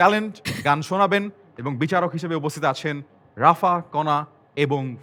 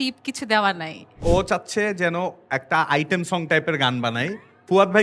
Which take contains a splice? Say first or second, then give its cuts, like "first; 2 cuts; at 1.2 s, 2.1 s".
second; 1 cut; at 1.2 s